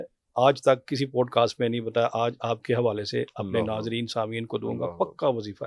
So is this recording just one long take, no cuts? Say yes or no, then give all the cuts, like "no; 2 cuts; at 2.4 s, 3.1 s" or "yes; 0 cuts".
yes; 0 cuts